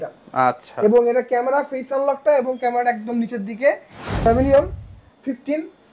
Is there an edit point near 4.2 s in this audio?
yes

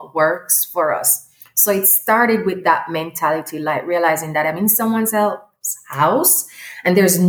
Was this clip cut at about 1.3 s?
no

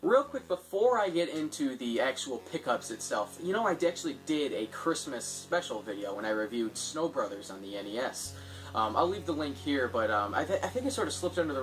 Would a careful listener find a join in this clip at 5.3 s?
yes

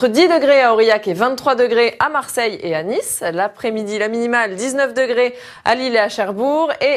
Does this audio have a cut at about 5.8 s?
no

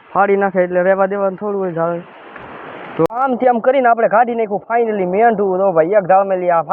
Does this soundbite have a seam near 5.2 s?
no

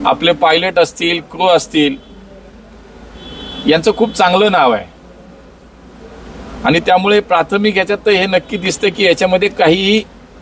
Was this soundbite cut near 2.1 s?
no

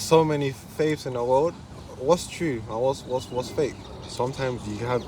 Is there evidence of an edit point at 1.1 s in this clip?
no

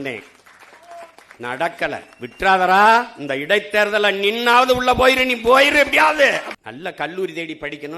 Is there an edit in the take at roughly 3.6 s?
no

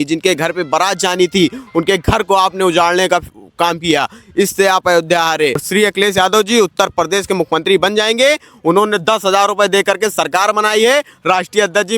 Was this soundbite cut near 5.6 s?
yes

